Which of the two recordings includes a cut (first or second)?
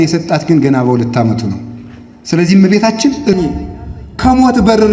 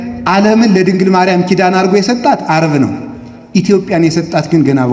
first